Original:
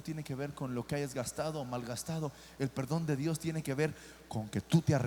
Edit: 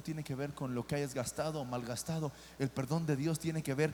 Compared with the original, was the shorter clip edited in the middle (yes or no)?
no